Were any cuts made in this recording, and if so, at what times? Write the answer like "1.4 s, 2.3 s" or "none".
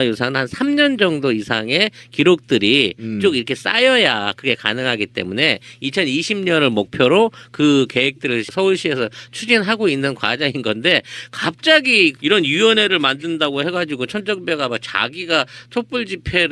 none